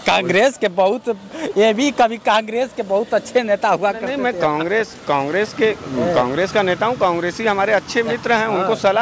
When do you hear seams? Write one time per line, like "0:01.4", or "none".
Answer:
none